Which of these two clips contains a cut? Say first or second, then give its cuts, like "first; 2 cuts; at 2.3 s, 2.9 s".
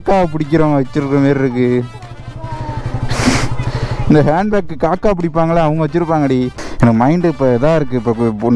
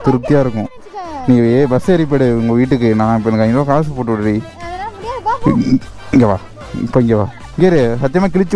first; 1 cut; at 6.6 s